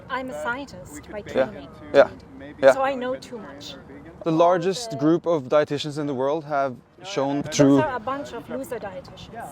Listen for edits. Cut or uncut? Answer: cut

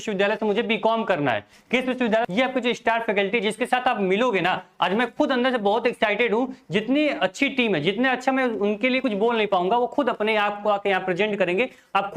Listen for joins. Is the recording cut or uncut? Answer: cut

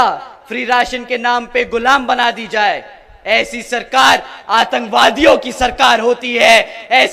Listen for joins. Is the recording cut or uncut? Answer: uncut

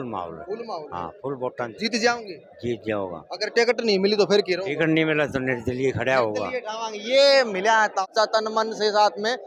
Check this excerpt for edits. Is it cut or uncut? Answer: cut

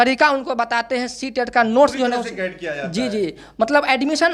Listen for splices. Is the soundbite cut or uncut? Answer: uncut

